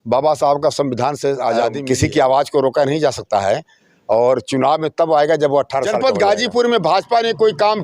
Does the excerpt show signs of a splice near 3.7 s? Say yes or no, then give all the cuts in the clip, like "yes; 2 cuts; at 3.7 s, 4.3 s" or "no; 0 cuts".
no; 2 cuts; at 1.8 s, 6.0 s